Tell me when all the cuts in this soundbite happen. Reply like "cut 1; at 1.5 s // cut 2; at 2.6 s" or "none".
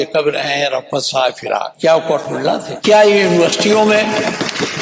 cut 1; at 1.7 s // cut 2; at 2.7 s

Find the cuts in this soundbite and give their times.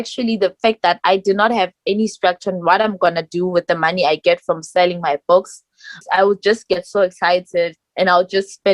cut 1; at 6.0 s

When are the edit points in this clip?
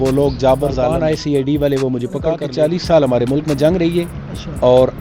cut 1; at 1.2 s // cut 2; at 2.5 s

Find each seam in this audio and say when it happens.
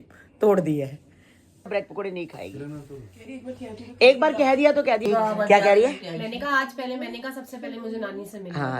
cut 1; at 1.7 s // cut 2; at 5.0 s

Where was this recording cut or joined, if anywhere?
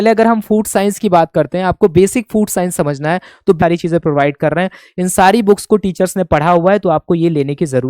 cut 1; at 3.6 s

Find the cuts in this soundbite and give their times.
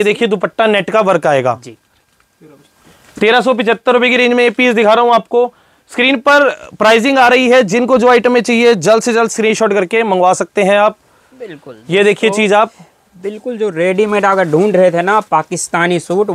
none

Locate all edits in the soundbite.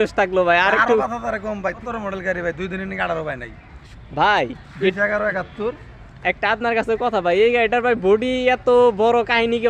cut 1; at 1.8 s // cut 2; at 3.8 s

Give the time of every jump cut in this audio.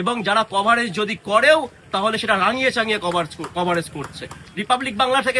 cut 1; at 4.4 s

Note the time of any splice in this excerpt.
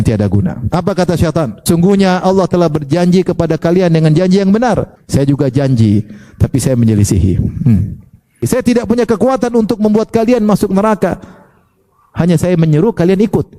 cut 1; at 1.6 s // cut 2; at 5.0 s // cut 3; at 8.5 s

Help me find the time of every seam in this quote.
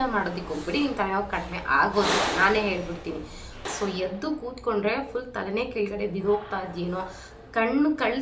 cut 1; at 3.7 s

